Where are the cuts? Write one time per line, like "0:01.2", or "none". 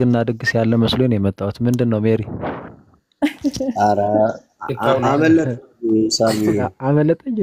none